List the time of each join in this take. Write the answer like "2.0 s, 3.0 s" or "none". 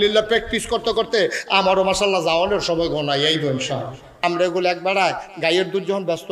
4.1 s

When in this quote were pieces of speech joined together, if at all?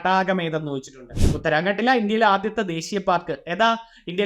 1.2 s

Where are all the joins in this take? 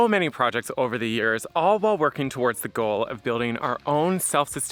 none

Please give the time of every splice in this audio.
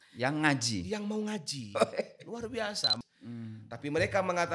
3.0 s

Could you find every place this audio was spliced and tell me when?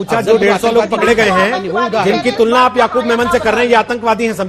none

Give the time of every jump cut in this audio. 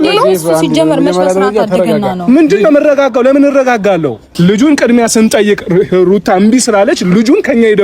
4.2 s

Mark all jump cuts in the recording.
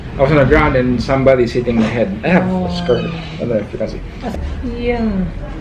4.3 s

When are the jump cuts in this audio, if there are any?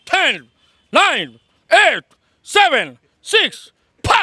none

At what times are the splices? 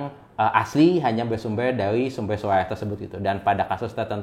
none

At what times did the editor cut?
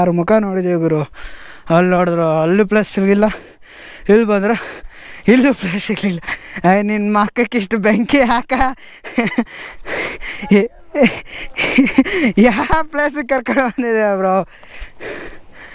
none

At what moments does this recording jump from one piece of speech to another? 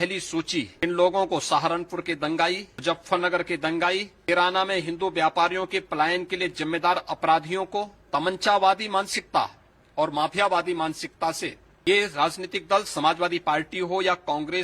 0.8 s, 2.7 s, 4.3 s, 8.0 s, 11.7 s

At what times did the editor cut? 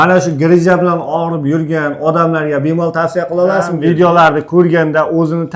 3.7 s

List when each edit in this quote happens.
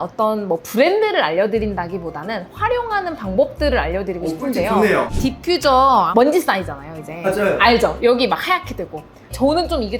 5.1 s

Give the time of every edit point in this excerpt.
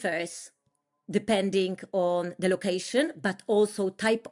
none

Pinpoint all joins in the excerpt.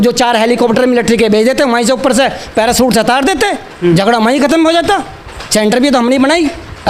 none

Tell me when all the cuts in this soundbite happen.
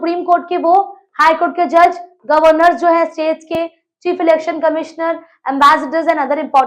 none

